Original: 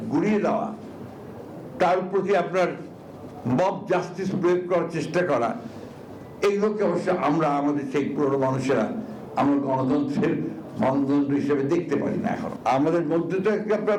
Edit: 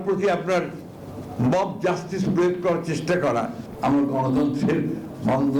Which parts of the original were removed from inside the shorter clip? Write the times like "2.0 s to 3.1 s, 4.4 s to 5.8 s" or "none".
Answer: 5.7 s to 9.2 s